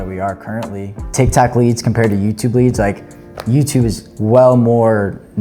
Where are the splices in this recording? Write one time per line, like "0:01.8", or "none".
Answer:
0:01.0
0:04.1